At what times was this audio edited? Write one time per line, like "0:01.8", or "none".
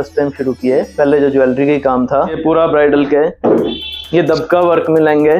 0:02.4